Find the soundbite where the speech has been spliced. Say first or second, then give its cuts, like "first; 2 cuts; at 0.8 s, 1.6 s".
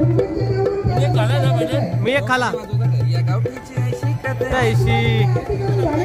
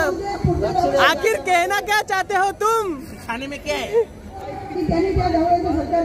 second; 1 cut; at 4.5 s